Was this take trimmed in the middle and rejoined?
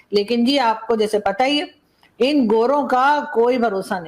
no; 0 cuts

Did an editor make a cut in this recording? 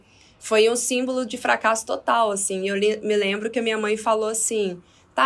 no; 0 cuts

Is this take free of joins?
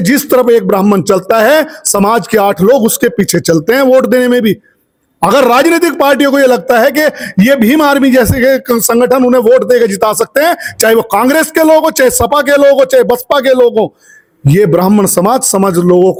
yes; 0 cuts

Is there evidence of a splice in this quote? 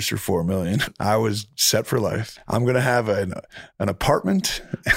yes; 2 cuts; at 0.8 s, 2.3 s

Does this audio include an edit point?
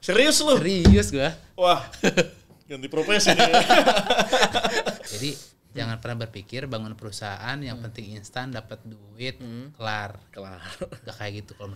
yes; 1 cut; at 5.1 s

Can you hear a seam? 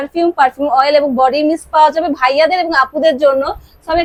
no; 0 cuts

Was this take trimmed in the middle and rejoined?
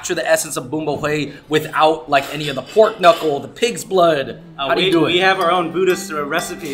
no; 0 cuts

